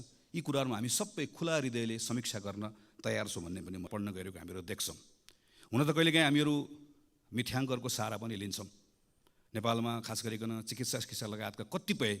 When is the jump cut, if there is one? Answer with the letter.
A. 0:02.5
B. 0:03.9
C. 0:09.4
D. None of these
B